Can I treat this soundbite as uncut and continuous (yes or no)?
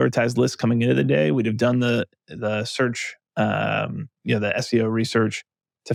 yes